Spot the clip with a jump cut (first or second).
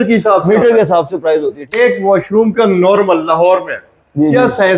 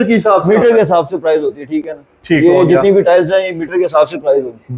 first